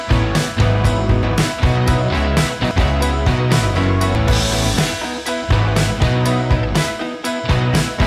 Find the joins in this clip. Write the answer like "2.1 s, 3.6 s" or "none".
1.2 s, 2.7 s, 4.2 s